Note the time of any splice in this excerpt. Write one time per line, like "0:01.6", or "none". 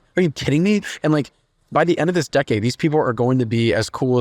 none